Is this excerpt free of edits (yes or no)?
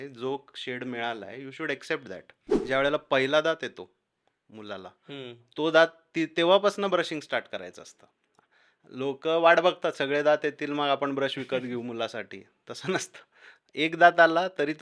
no